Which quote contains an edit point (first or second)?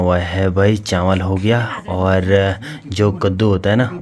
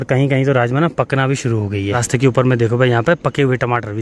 second